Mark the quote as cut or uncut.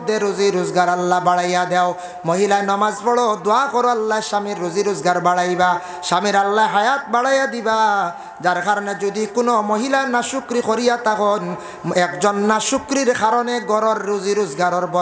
uncut